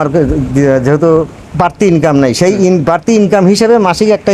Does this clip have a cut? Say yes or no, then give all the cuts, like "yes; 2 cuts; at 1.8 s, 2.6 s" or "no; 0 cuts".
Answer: no; 0 cuts